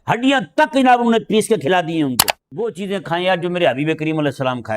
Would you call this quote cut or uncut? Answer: cut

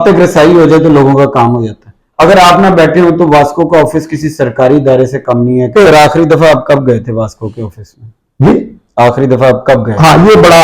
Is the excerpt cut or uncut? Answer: cut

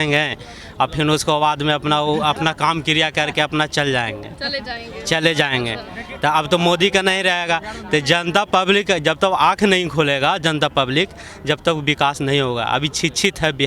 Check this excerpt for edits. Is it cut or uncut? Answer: uncut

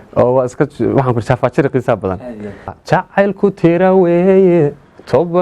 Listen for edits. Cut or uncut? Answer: cut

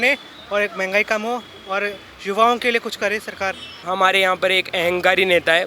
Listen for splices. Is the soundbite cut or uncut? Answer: cut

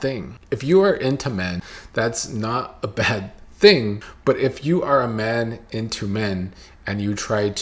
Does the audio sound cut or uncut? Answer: cut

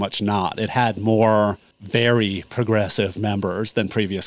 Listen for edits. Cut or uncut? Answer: cut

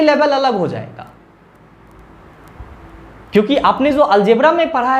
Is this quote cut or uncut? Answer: uncut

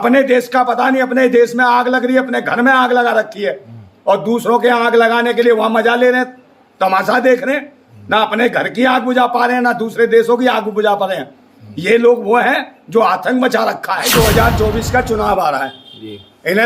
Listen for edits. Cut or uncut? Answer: cut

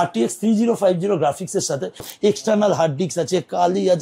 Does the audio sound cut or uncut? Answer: cut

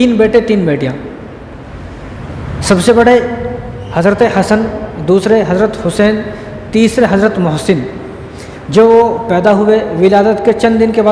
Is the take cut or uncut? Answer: uncut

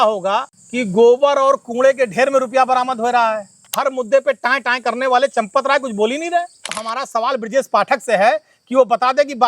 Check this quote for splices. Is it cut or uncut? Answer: cut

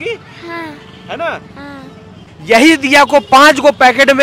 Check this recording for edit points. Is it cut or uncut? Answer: cut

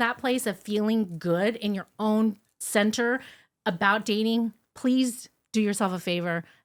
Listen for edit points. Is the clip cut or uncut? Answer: uncut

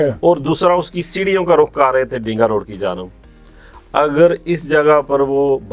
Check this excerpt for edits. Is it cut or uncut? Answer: uncut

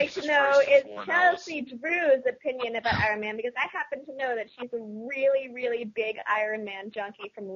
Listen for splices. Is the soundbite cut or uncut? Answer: uncut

